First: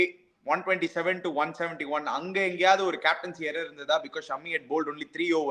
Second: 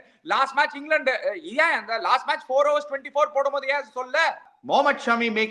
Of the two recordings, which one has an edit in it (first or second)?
second